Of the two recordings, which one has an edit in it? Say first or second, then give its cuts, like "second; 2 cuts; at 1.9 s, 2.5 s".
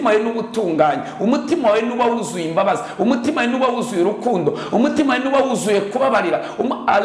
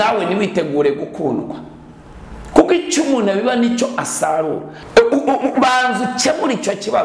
second; 1 cut; at 4.7 s